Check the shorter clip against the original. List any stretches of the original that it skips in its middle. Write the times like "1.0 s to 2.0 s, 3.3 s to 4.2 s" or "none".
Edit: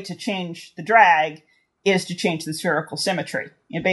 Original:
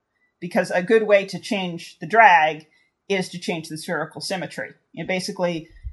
none